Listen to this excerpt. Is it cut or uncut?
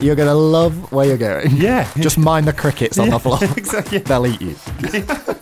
cut